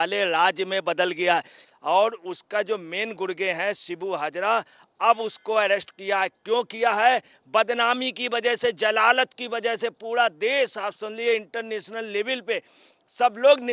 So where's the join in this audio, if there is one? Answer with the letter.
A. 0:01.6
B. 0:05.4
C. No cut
A